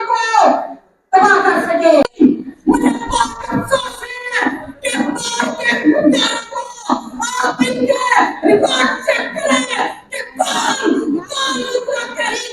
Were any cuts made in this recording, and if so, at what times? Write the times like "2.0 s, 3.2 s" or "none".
2.1 s